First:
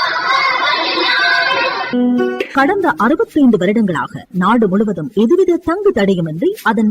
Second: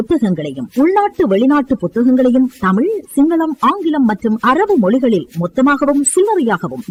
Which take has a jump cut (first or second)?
first